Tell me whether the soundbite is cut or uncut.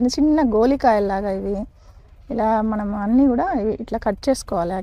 uncut